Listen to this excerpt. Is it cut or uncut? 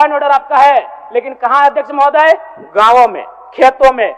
uncut